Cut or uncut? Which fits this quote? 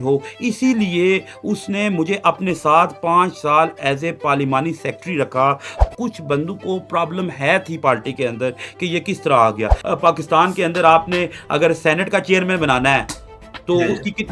cut